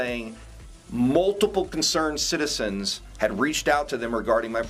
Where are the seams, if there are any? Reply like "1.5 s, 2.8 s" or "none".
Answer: none

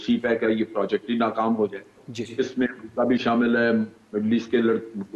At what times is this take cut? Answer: none

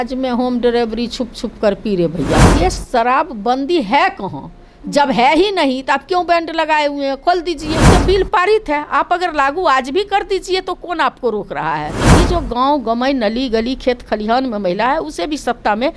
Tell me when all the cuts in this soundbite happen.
2.4 s, 7.9 s, 12.1 s

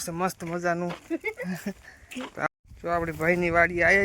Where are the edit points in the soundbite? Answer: 2.5 s

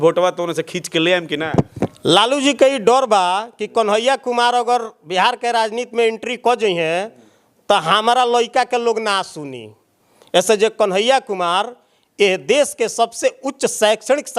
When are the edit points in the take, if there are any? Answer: 1.8 s

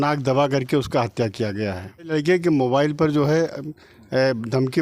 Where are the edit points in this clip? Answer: 2.1 s

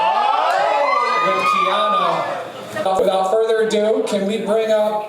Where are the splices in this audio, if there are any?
2.8 s

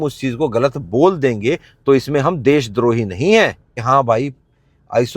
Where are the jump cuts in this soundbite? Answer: 3.8 s

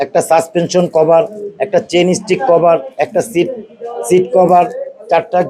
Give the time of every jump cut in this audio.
none

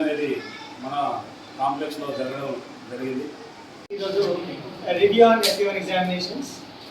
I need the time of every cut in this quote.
3.8 s

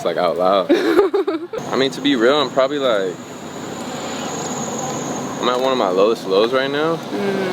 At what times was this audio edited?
1.5 s

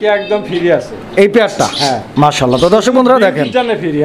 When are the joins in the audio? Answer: none

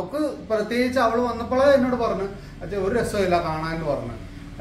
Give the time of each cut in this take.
none

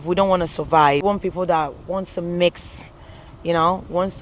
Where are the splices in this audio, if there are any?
1.0 s

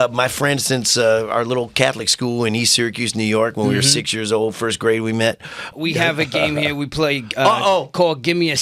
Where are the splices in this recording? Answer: 5.7 s

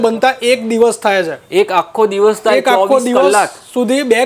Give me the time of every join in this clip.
none

